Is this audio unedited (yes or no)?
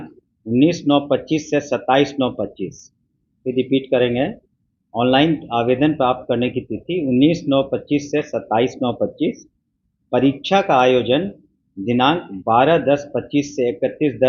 yes